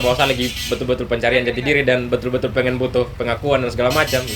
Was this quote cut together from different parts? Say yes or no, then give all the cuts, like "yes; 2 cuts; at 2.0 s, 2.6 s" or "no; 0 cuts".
no; 0 cuts